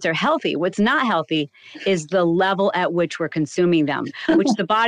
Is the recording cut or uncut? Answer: uncut